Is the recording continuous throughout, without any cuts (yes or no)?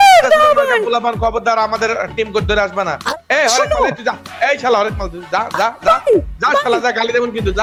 yes